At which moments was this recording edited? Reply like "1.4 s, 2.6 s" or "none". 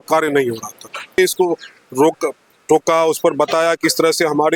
1.2 s